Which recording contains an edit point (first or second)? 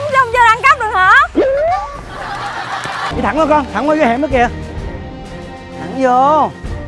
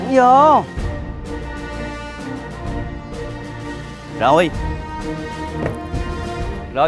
first